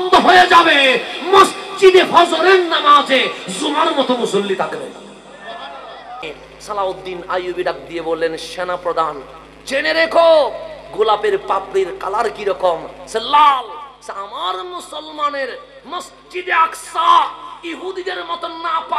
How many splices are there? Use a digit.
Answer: 1